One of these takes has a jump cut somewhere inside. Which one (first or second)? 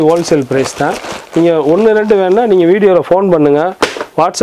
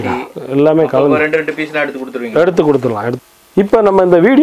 second